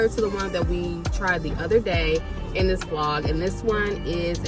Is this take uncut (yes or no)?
yes